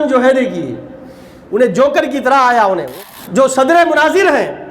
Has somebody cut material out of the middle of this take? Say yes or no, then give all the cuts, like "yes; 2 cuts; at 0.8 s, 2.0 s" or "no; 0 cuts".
yes; 1 cut; at 2.9 s